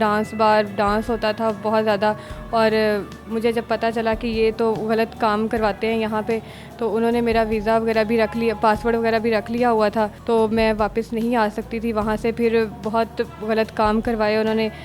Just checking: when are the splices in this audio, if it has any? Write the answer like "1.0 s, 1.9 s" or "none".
none